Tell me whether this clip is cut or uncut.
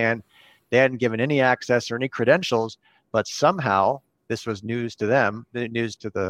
uncut